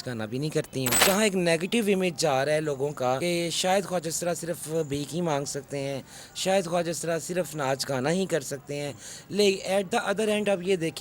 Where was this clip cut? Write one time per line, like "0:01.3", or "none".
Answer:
0:01.0
0:03.2

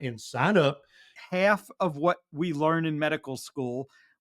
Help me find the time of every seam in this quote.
0:01.2

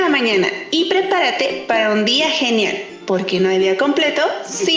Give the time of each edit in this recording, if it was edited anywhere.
none

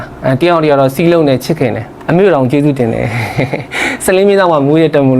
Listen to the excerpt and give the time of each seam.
0:02.0

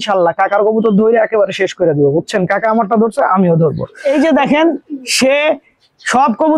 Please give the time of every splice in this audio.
0:04.0

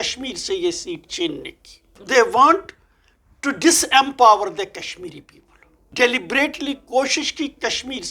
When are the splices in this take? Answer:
0:02.0
0:05.9

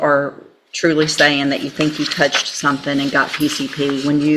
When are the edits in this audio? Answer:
none

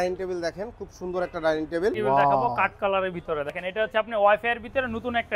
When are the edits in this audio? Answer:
0:02.0
0:03.6

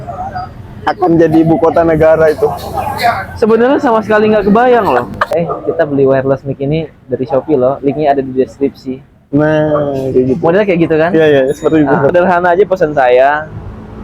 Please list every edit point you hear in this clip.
0:05.2
0:12.1

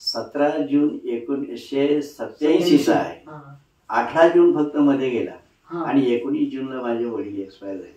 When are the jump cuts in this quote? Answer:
none

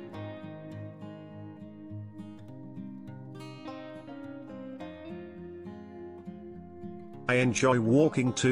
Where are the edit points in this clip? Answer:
none

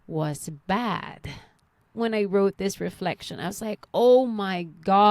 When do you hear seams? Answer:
0:02.0

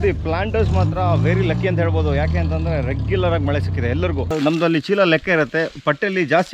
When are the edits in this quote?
0:04.3

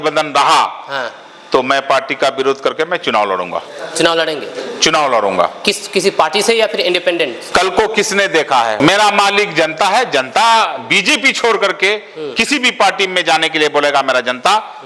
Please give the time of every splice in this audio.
0:08.8

